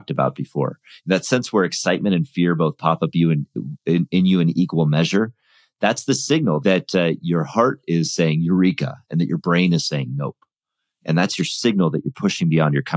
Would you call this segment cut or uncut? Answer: cut